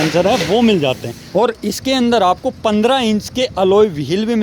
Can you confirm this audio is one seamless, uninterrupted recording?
no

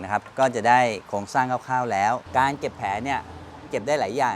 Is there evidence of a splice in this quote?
yes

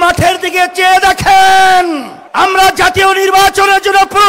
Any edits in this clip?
yes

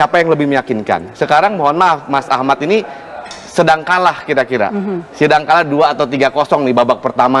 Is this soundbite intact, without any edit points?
yes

